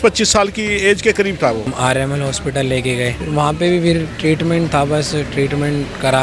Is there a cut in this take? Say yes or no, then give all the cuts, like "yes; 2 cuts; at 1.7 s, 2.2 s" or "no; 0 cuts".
yes; 2 cuts; at 1.6 s, 3.2 s